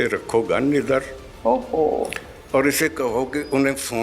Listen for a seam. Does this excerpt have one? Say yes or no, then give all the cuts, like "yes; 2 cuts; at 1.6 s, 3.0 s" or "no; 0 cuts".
no; 0 cuts